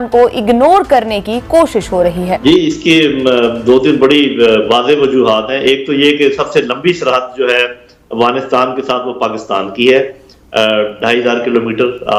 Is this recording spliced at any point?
no; 0 cuts

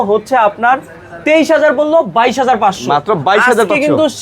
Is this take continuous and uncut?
yes; 0 cuts

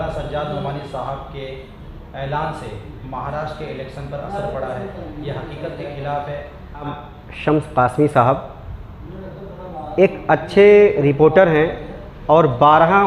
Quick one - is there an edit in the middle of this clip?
yes; 1 cut; at 6.9 s

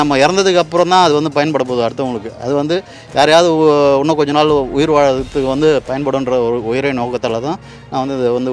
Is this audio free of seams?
yes; 0 cuts

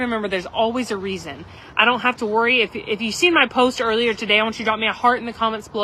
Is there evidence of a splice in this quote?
no; 0 cuts

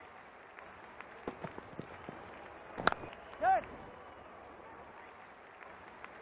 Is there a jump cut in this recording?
no; 0 cuts

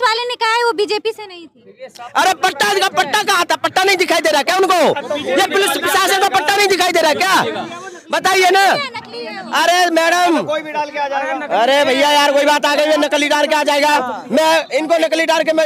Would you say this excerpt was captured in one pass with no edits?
yes; 0 cuts

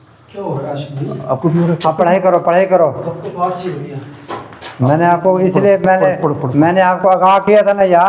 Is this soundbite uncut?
yes; 0 cuts

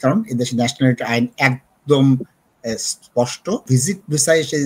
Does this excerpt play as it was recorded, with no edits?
no; 1 cut; at 3.6 s

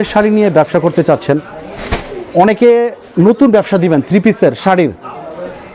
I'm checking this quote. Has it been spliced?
no; 0 cuts

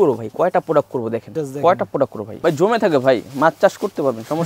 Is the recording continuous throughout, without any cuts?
no; 2 cuts; at 1.3 s, 2.2 s

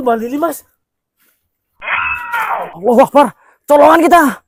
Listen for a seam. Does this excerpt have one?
no; 0 cuts

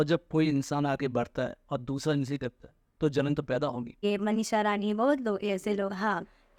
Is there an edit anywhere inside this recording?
yes; 1 cut; at 4.0 s

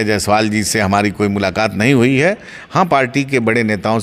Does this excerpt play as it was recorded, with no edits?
yes; 0 cuts

